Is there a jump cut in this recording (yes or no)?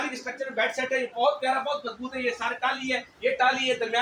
no